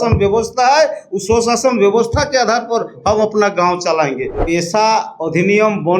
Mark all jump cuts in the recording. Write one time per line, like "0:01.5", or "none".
0:04.3